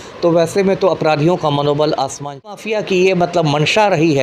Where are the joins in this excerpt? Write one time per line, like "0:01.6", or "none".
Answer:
0:02.5